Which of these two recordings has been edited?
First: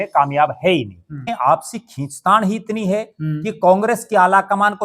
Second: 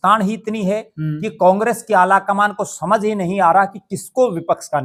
first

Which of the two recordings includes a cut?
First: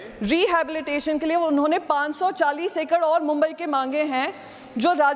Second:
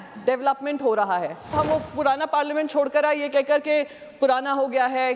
second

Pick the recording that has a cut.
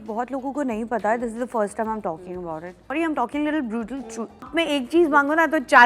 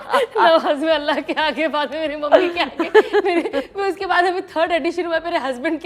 first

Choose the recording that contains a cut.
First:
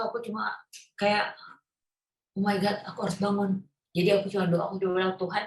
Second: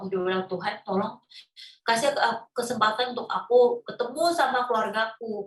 first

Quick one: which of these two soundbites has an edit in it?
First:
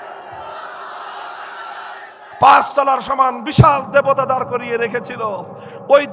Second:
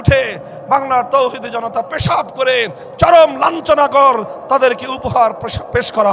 first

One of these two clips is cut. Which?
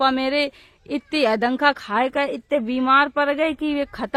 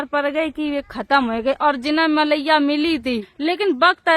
second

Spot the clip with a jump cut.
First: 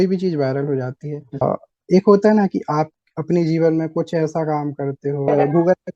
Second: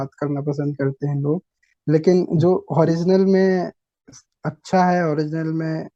first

